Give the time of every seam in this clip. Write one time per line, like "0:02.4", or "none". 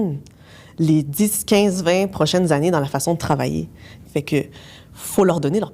0:03.9